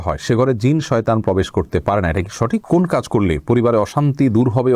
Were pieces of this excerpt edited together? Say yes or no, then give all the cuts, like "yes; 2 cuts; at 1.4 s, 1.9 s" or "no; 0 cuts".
yes; 1 cut; at 2.6 s